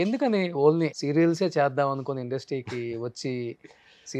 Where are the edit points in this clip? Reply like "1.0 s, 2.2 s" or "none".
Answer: 1.0 s